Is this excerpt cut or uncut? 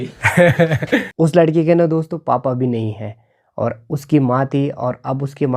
cut